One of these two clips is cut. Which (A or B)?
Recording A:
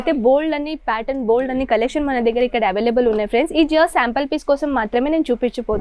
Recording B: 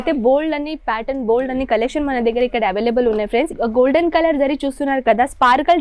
B